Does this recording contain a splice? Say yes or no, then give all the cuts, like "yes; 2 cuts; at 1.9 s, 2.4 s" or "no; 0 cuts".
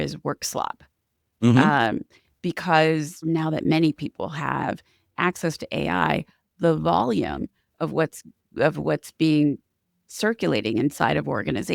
yes; 1 cut; at 3.1 s